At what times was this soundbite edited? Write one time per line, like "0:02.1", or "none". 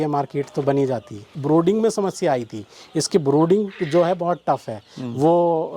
0:01.3